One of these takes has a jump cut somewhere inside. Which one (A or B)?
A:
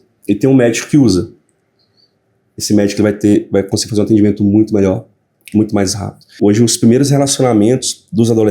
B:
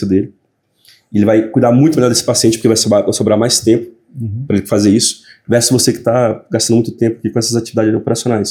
A